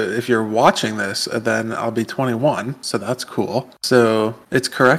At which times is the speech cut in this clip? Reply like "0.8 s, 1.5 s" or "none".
none